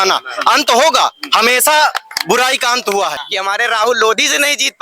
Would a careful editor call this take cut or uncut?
cut